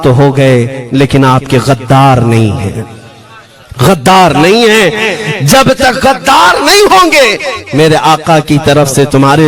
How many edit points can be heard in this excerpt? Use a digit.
0